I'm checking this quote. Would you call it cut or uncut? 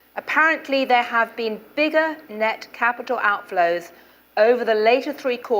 cut